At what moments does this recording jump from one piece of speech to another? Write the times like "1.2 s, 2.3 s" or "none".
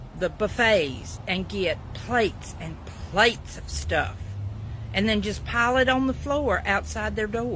none